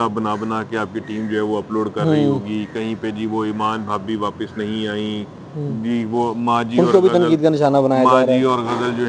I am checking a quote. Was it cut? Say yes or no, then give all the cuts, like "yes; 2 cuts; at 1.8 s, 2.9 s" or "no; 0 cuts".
no; 0 cuts